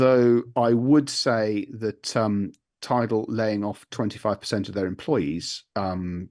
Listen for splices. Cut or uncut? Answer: uncut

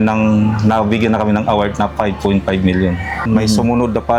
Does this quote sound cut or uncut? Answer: cut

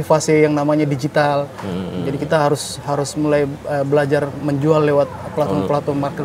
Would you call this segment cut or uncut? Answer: uncut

